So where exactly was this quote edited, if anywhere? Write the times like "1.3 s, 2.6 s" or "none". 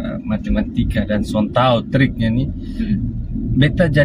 none

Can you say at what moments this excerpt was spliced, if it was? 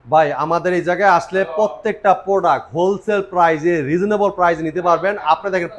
none

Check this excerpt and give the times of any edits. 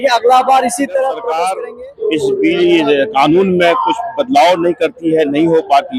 1.5 s

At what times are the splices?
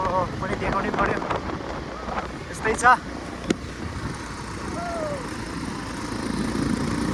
none

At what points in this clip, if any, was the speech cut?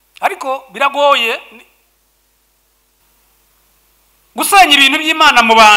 3.0 s

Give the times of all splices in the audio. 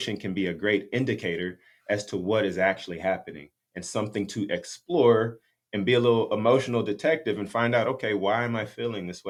none

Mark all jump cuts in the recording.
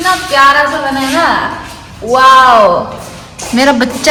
none

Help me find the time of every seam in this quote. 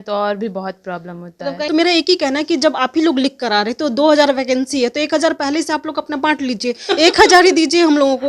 1.6 s

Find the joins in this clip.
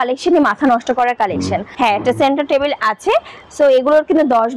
1.7 s

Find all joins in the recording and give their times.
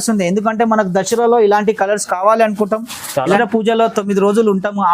3.4 s

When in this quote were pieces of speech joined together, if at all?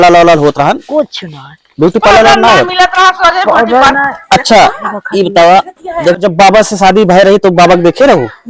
6.2 s

